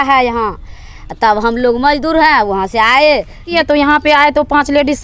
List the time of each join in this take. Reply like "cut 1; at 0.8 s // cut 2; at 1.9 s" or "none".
cut 1; at 3.5 s